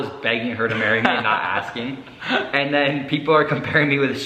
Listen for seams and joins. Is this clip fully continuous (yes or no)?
yes